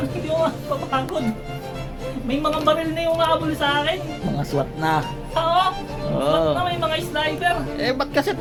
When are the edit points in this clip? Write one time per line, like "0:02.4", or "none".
none